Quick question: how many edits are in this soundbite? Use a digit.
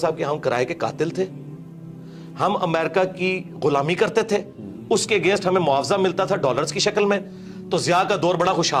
0